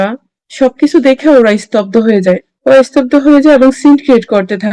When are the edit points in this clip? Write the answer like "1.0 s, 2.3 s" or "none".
none

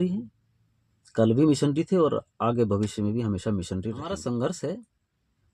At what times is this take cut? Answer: 4.0 s

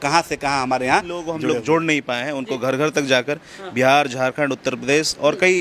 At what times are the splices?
1.3 s

